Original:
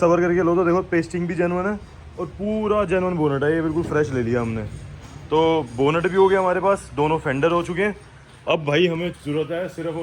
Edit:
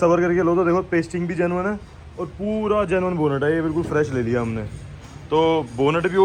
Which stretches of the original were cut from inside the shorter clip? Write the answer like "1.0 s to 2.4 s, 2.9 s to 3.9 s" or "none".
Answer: none